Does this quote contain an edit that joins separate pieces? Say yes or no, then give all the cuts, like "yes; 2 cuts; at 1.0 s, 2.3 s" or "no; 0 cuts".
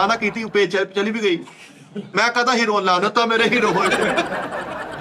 no; 0 cuts